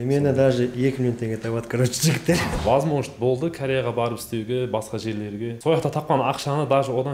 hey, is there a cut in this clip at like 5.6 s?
yes; 2 cuts; at 2.4 s, 5.6 s

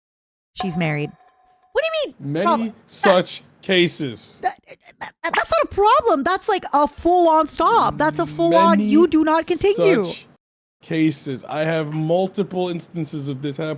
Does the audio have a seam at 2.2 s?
no; 0 cuts

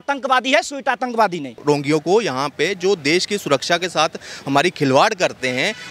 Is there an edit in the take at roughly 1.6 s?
yes; 1 cut; at 1.6 s

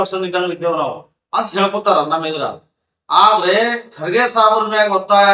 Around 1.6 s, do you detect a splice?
no; 0 cuts

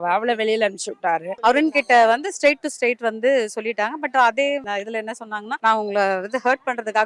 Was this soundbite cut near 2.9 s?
no; 2 cuts; at 1.3 s, 4.9 s

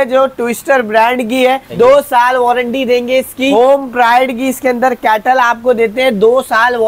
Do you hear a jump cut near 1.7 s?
yes; 2 cuts; at 1.7 s, 3.5 s

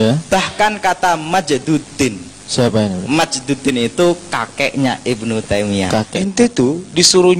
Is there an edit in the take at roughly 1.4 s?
no; 1 cut; at 6.1 s

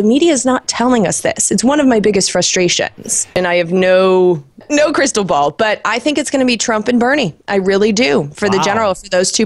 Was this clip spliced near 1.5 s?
no; 2 cuts; at 3.4 s, 4.6 s

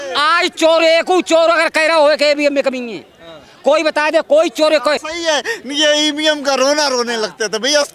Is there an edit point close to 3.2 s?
no; 1 cut; at 5.1 s

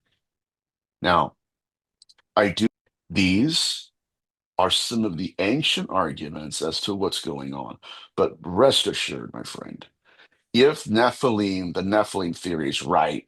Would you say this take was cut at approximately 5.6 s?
no; 1 cut; at 2.7 s

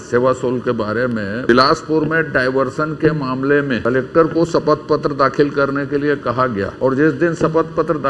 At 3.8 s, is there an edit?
yes; 3 cuts; at 1.5 s, 3.8 s, 6.7 s

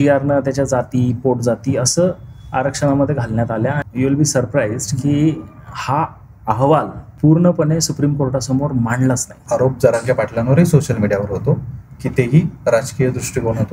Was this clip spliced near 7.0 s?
yes; 3 cuts; at 3.8 s, 7.0 s, 9.4 s

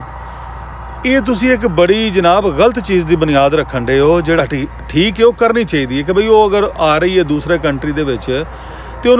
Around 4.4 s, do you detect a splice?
yes; 1 cut; at 4.4 s

